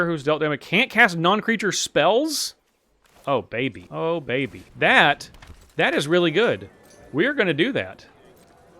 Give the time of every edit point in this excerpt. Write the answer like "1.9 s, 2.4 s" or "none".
3.8 s, 4.6 s